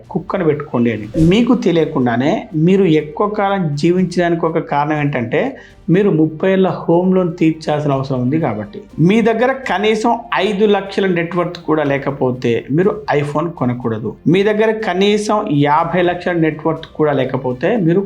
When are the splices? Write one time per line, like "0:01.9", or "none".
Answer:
0:01.1
0:08.9

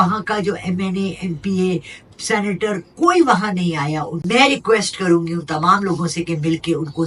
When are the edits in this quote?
0:04.1

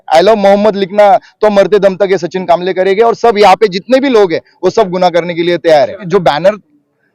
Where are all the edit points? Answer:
0:06.0

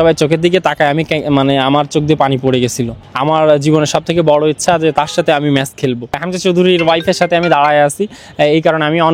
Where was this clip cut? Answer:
0:03.1
0:06.3

